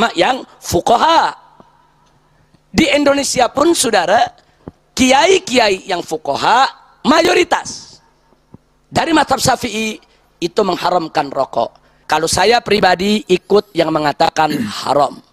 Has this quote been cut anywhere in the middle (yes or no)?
no